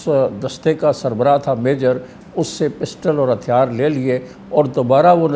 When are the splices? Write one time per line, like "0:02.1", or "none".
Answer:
none